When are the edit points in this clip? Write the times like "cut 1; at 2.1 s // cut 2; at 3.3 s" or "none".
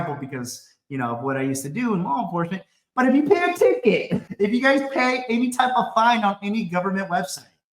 cut 1; at 4.2 s